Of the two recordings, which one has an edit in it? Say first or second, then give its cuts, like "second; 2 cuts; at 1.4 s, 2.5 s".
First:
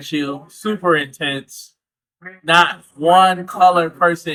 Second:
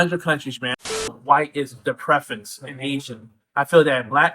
second; 1 cut; at 1.0 s